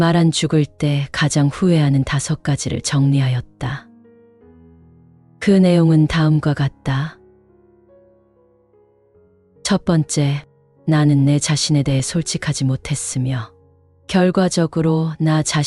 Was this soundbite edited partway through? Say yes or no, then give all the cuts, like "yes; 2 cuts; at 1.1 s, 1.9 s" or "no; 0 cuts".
yes; 2 cuts; at 7.1 s, 9.6 s